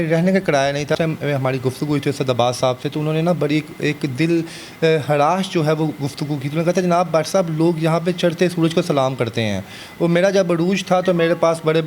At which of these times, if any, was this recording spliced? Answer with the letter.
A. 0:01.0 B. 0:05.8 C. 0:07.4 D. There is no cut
A